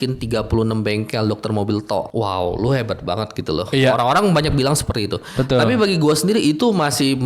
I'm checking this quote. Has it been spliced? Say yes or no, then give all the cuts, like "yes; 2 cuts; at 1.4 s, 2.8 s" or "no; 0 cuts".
yes; 1 cut; at 2.1 s